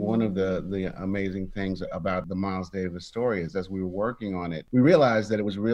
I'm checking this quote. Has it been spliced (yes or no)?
yes